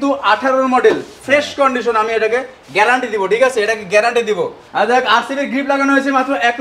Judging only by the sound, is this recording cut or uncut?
uncut